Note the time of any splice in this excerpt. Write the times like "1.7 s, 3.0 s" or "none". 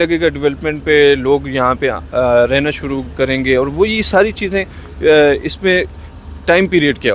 none

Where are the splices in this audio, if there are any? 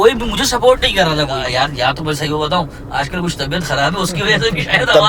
1.4 s

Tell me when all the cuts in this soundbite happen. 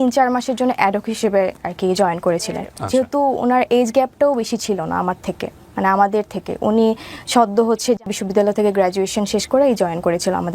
2.7 s, 8.1 s

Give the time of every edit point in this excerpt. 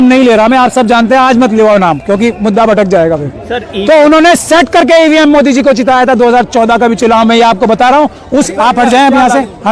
8.5 s

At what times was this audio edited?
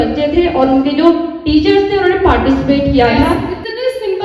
3.1 s

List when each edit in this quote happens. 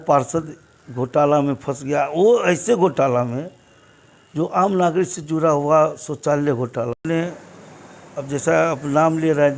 7.0 s

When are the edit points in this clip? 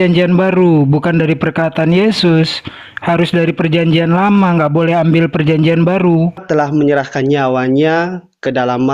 6.4 s

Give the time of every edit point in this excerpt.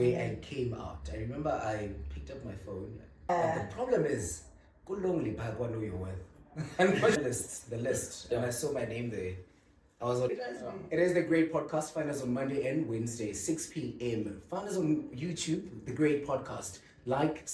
3.3 s, 7.1 s, 10.3 s

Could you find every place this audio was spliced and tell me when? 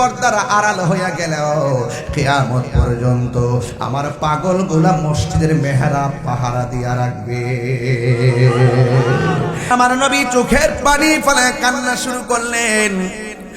9.7 s

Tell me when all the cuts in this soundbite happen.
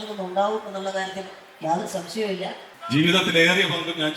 2.7 s

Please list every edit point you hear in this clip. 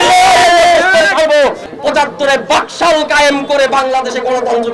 1.6 s

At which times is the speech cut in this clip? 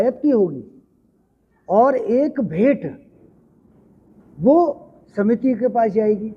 none

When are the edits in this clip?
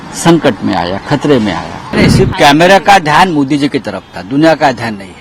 1.9 s

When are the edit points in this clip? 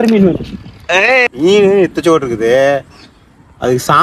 1.3 s

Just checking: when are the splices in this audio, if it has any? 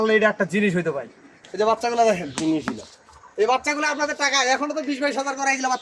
1.4 s

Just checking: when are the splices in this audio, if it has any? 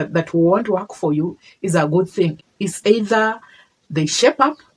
2.4 s

